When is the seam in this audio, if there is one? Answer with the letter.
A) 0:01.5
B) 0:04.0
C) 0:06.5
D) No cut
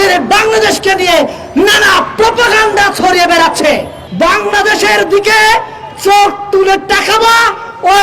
B